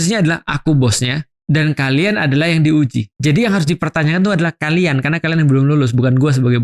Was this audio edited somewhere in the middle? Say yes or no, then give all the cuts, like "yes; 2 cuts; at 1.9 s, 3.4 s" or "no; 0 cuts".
yes; 2 cuts; at 1.3 s, 3.1 s